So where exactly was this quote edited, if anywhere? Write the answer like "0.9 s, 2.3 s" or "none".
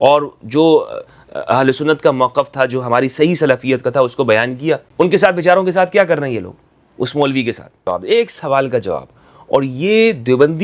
4.9 s, 7.8 s